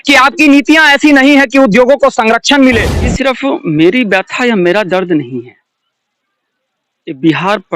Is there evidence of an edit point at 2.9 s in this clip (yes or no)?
yes